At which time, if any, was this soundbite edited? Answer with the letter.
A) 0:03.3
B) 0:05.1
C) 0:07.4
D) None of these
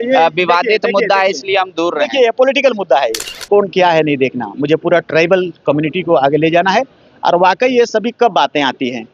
A